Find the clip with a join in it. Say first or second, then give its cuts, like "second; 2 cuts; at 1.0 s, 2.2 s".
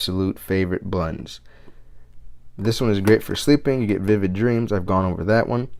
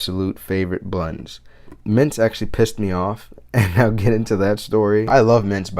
second; 2 cuts; at 1.7 s, 5.1 s